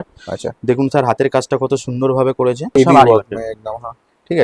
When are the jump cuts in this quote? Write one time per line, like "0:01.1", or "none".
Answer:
0:02.8